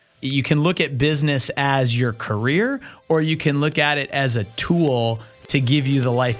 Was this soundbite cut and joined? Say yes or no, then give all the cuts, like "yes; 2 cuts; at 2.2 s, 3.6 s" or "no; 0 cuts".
no; 0 cuts